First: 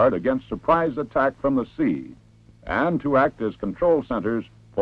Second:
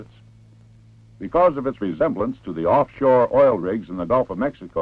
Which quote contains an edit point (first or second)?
first